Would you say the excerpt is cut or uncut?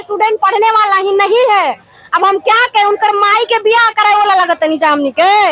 uncut